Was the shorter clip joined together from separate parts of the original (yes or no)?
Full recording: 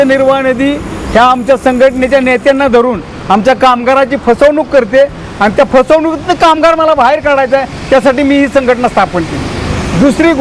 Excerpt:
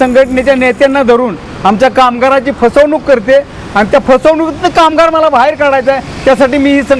no